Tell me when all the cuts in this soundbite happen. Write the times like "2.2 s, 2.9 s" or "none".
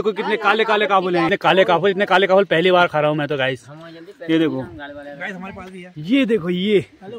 1.3 s